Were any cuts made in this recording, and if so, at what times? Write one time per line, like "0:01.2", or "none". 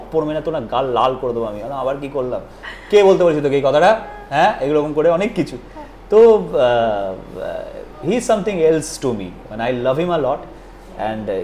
none